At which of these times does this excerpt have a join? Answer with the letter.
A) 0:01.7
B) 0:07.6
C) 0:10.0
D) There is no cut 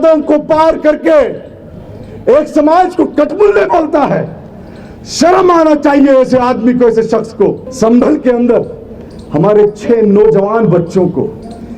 B